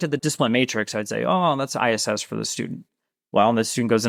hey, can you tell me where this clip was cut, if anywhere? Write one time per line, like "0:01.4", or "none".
none